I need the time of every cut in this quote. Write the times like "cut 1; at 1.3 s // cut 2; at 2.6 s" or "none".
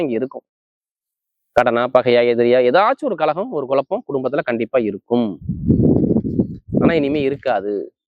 none